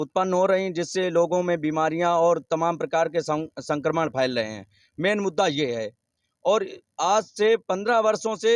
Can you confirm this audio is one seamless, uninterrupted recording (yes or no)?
yes